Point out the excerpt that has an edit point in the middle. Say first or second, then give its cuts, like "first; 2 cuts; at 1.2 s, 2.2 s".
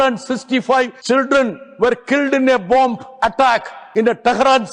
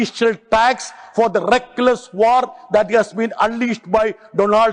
first; 2 cuts; at 1.0 s, 3.8 s